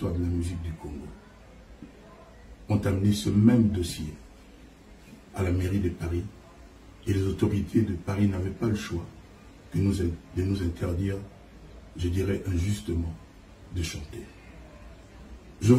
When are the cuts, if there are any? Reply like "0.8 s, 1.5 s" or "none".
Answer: none